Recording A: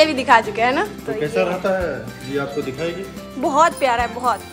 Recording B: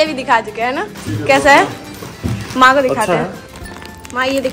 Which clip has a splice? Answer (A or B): A